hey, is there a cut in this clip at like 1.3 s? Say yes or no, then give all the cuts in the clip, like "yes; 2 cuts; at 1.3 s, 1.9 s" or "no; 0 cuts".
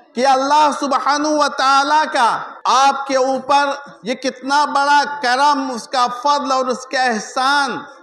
no; 2 cuts; at 2.5 s, 3.9 s